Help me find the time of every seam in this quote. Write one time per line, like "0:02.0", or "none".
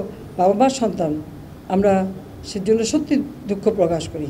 none